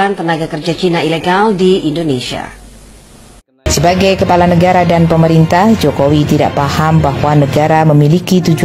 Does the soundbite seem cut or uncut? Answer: cut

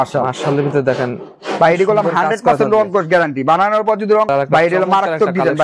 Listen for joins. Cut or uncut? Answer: cut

